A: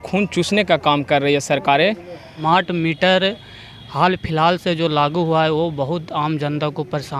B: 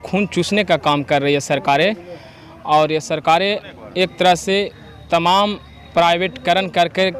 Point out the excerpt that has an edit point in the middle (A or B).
A